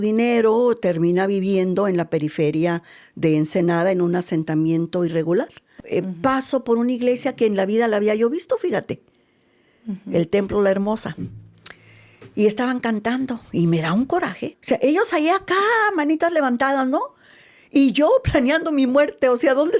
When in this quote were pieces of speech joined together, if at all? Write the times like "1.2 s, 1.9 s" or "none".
5.6 s, 14.5 s